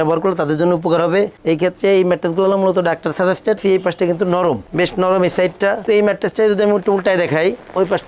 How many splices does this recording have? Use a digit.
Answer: 2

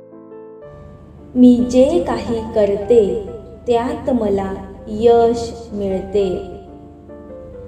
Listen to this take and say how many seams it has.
1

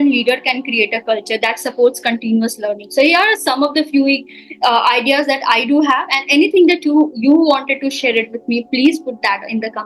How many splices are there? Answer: 0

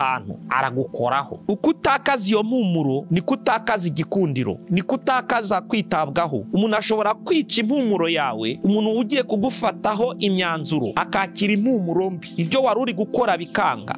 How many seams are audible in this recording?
2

